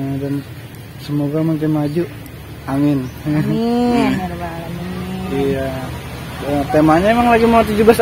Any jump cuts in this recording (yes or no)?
no